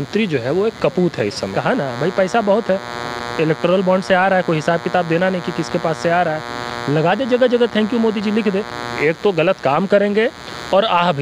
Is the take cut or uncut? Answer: cut